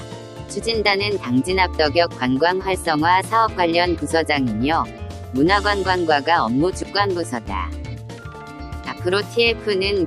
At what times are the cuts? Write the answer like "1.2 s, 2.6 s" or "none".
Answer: 7.7 s, 9.0 s